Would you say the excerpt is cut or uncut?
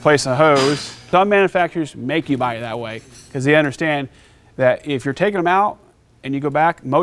cut